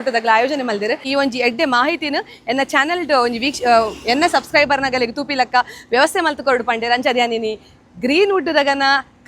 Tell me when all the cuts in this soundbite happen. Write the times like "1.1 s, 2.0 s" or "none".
1.0 s

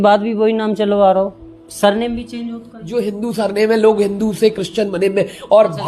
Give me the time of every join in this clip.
2.7 s

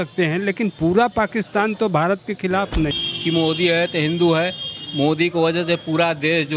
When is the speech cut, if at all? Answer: 2.9 s

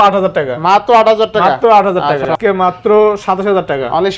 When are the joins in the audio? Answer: 2.3 s

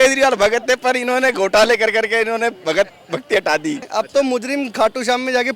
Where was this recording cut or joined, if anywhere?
3.9 s

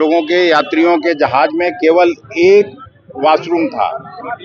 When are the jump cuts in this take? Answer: none

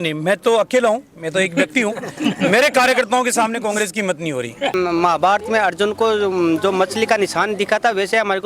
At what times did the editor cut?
4.7 s

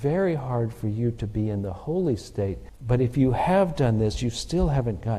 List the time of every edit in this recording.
2.7 s

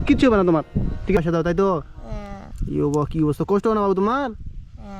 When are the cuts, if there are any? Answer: 1.2 s

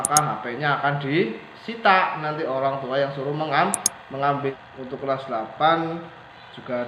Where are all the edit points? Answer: 4.6 s

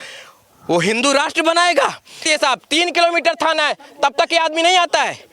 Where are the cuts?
2.2 s

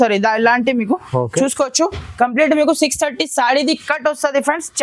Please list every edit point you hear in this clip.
none

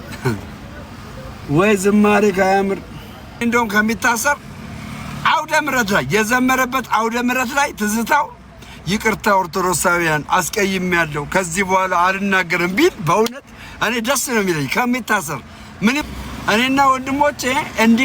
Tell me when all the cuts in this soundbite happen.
3.4 s, 16.0 s

